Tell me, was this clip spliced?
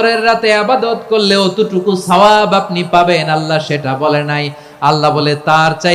no; 0 cuts

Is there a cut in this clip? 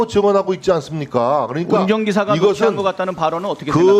no; 0 cuts

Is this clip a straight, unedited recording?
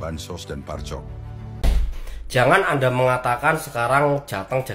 no; 1 cut; at 1.6 s

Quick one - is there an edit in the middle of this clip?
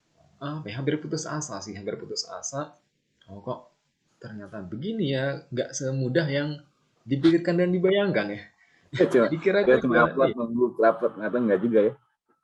no; 0 cuts

